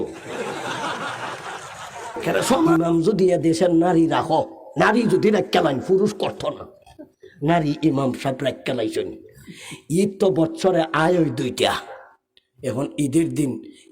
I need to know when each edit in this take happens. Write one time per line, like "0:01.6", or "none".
0:02.7